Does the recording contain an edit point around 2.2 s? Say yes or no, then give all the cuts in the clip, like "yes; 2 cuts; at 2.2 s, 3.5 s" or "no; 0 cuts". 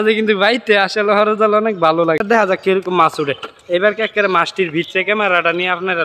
yes; 1 cut; at 2.2 s